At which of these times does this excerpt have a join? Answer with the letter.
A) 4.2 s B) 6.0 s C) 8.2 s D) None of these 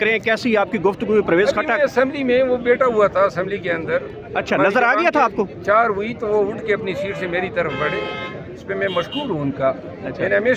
D